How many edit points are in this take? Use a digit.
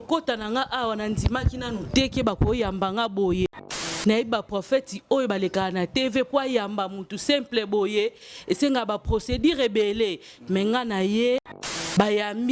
0